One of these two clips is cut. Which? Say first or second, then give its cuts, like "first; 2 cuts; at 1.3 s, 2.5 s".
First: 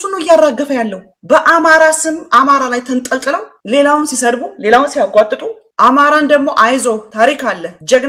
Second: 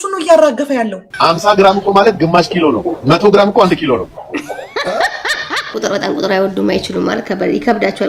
second; 2 cuts; at 1.1 s, 5.7 s